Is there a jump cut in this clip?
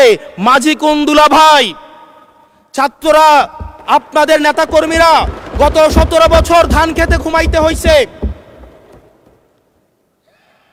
no; 0 cuts

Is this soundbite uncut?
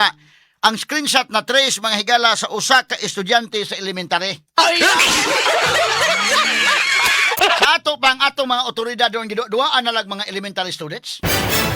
no; 1 cut; at 7.4 s

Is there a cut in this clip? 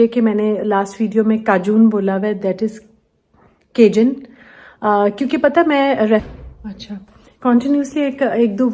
yes; 1 cut; at 6.3 s

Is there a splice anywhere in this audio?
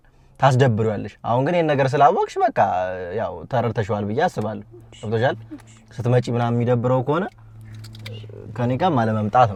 no; 0 cuts

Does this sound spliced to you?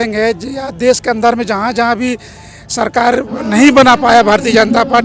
no; 0 cuts

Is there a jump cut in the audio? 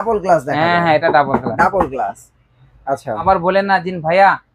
yes; 1 cut; at 3.2 s

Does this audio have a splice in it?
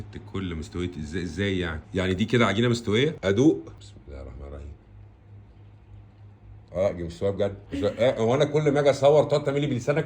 yes; 5 cuts; at 1.8 s, 3.2 s, 3.8 s, 6.7 s, 7.6 s

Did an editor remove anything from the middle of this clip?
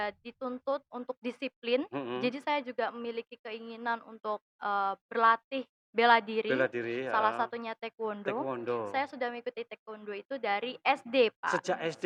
no; 0 cuts

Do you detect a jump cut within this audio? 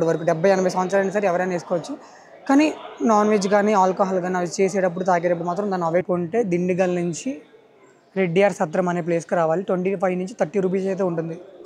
yes; 1 cut; at 6.1 s

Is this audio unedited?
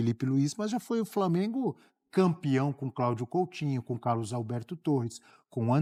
yes; 0 cuts

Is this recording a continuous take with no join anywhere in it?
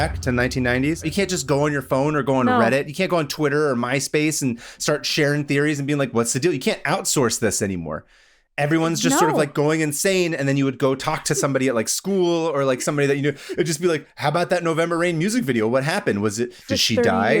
no; 1 cut; at 1.1 s

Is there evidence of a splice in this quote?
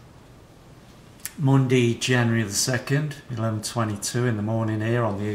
no; 0 cuts

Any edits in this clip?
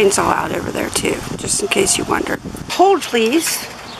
yes; 1 cut; at 2.7 s

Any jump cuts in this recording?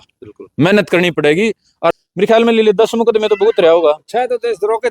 yes; 1 cut; at 1.9 s

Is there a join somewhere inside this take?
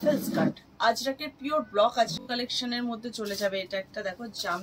yes; 1 cut; at 2.2 s

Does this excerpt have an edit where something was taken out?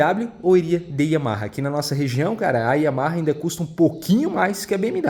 no; 0 cuts

